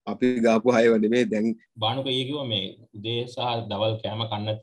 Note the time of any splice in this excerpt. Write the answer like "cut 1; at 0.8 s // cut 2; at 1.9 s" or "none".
cut 1; at 1.7 s